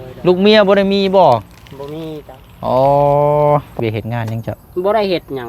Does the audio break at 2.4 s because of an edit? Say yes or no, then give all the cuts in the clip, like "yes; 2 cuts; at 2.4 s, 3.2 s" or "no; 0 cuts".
no; 1 cut; at 3.7 s